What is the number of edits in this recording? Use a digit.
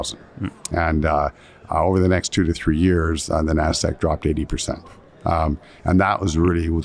0